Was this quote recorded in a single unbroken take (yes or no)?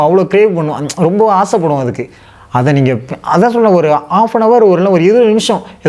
yes